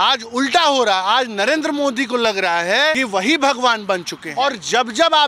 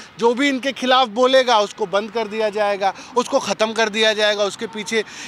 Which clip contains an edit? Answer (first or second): first